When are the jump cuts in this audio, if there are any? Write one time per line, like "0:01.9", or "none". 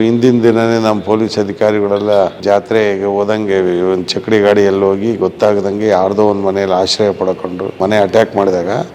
0:07.8